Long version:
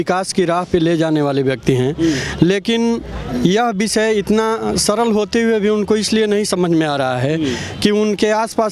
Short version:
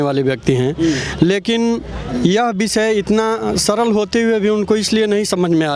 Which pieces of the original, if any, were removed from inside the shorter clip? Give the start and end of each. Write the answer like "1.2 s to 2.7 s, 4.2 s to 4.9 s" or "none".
none